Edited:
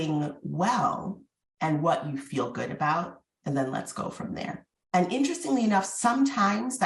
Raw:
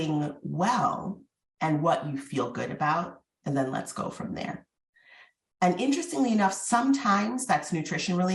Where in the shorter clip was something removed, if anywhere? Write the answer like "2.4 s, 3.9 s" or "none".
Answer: 4.7 s